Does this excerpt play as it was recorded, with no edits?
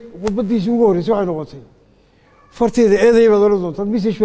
yes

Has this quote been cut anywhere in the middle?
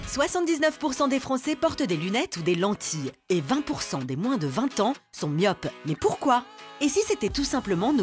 no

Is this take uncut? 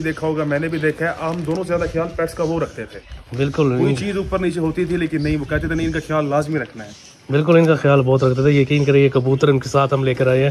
yes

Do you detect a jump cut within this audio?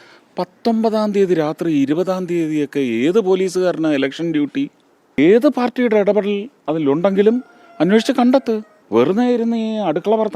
yes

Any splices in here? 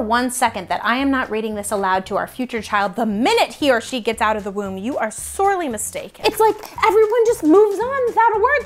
yes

